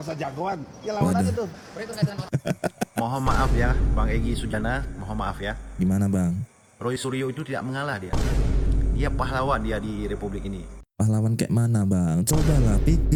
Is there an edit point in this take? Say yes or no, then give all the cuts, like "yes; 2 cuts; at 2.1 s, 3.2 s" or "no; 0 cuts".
no; 0 cuts